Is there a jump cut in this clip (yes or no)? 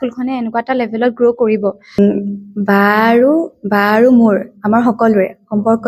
yes